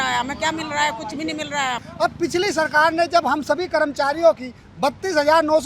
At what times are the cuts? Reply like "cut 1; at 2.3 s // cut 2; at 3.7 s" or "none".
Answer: cut 1; at 1.8 s